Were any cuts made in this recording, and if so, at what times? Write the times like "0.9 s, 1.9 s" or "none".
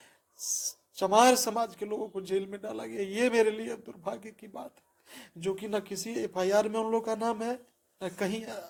none